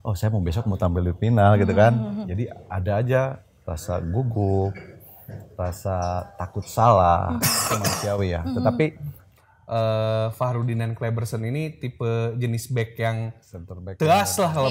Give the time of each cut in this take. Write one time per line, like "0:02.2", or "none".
0:09.2